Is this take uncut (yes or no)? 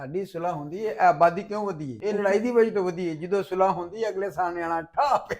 no